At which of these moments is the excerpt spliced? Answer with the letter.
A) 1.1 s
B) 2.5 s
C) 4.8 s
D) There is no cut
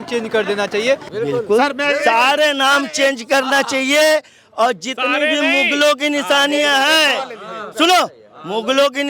A